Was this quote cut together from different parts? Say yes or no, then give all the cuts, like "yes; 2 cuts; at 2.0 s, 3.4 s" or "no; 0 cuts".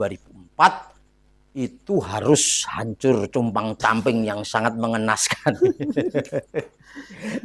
no; 0 cuts